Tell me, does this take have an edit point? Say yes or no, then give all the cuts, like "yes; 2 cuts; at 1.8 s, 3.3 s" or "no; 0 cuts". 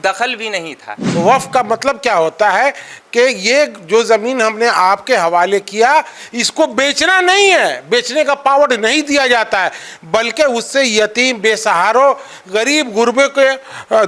yes; 1 cut; at 1.0 s